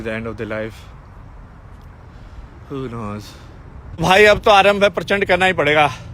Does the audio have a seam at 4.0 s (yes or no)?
yes